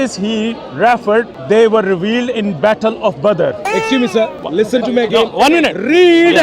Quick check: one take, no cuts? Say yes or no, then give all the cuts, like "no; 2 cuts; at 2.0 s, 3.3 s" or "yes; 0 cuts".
no; 2 cuts; at 1.4 s, 4.4 s